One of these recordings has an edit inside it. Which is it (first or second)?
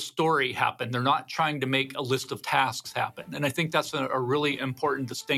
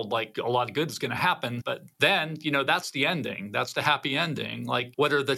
second